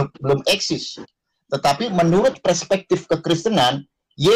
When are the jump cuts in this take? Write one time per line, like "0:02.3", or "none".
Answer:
none